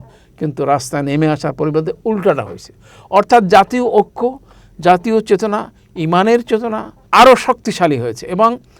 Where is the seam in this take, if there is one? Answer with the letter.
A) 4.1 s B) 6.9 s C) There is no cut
B